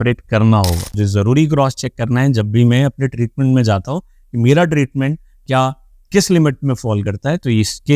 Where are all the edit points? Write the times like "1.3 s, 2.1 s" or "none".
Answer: 0.9 s